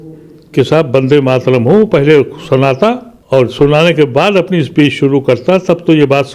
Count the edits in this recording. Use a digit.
1